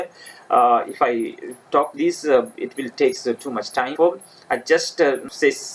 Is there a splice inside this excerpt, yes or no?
yes